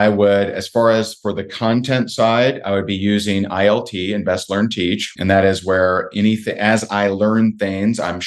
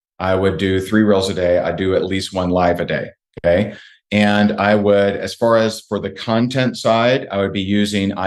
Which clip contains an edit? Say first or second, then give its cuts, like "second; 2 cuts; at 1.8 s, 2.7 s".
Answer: first; 1 cut; at 5.1 s